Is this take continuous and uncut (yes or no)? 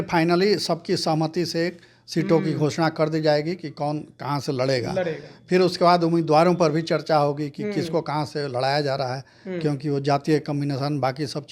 yes